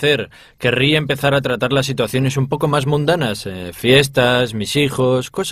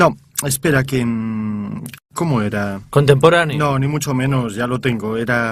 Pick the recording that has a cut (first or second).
second